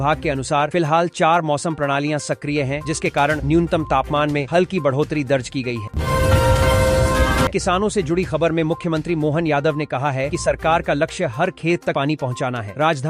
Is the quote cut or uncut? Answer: cut